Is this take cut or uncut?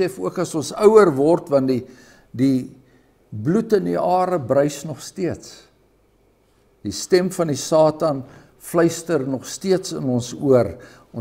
uncut